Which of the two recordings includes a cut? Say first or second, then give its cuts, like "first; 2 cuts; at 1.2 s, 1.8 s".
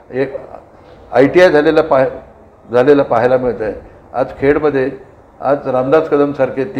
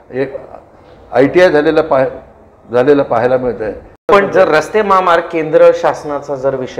second; 1 cut; at 4.0 s